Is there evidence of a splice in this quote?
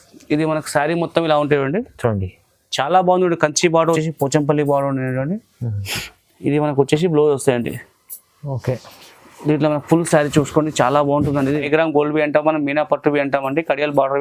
yes; 2 cuts; at 4.0 s, 11.6 s

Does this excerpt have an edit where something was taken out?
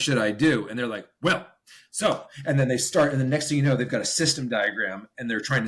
no; 0 cuts

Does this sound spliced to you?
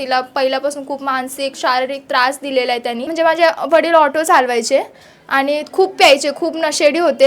yes; 1 cut; at 3.1 s

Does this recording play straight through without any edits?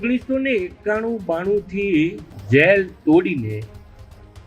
no; 1 cut; at 2.3 s

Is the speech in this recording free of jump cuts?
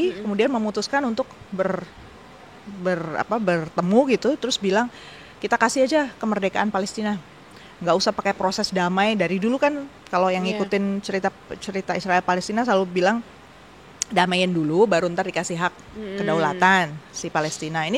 yes; 0 cuts

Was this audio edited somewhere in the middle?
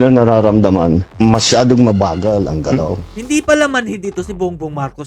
yes; 1 cut; at 1.1 s

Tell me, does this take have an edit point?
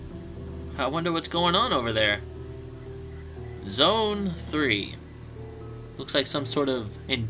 yes; 1 cut; at 5.7 s

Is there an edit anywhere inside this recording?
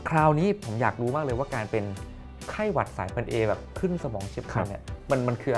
no; 0 cuts

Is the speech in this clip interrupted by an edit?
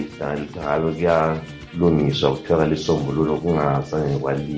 no; 0 cuts

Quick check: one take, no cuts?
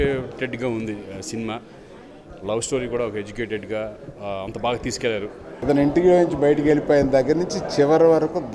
no; 1 cut; at 5.5 s

